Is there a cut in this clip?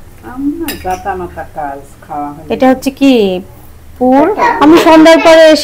yes; 1 cut; at 4.4 s

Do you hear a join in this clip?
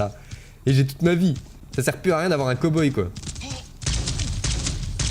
no; 0 cuts

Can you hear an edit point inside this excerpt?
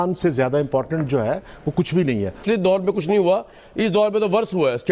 yes; 1 cut; at 2.4 s

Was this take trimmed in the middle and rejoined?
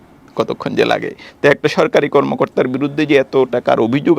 yes; 1 cut; at 1.2 s

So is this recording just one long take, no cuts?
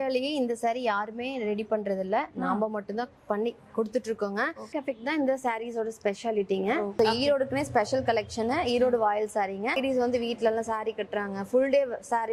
no; 3 cuts; at 4.7 s, 6.9 s, 9.8 s

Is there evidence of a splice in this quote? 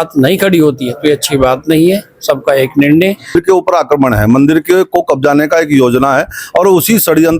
yes; 1 cut; at 3.3 s

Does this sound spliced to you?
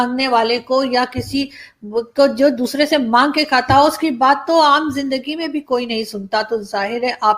no; 0 cuts

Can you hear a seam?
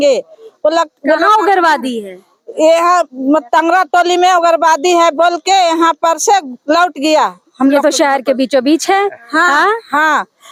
no; 0 cuts

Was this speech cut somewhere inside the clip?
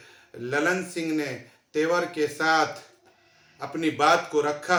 no; 0 cuts

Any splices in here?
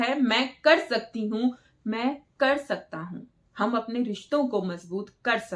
no; 0 cuts

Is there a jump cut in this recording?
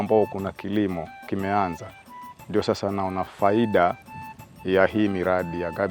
no; 0 cuts

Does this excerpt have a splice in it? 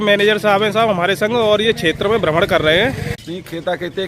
yes; 1 cut; at 3.1 s

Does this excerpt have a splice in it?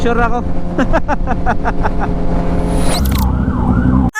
yes; 1 cut; at 3.0 s

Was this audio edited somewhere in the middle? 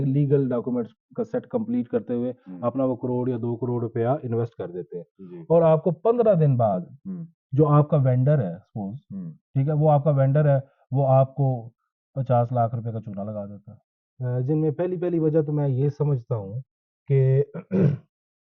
yes; 1 cut; at 13.9 s

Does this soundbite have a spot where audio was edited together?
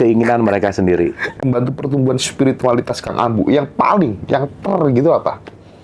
yes; 1 cut; at 1.4 s

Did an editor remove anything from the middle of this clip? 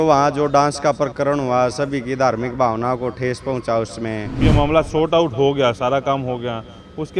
yes; 1 cut; at 4.4 s

